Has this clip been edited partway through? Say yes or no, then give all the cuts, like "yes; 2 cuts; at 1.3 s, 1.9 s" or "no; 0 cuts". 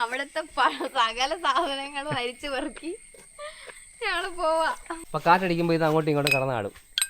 yes; 1 cut; at 4.9 s